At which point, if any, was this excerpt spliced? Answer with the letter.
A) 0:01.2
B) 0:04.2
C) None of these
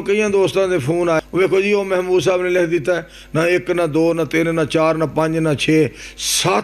A